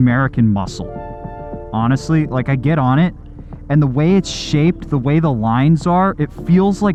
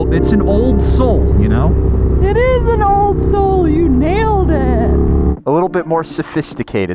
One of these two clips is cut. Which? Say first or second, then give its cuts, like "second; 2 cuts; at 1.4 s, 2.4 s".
second; 1 cut; at 5.4 s